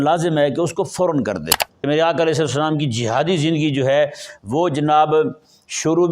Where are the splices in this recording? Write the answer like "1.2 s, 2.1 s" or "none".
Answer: 1.7 s